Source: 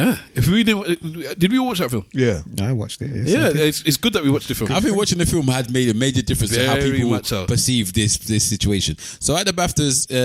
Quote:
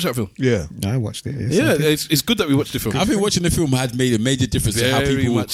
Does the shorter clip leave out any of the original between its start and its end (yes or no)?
no